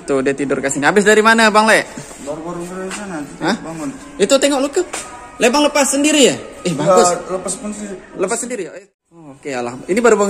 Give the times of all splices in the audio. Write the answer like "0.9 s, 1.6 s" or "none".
8.7 s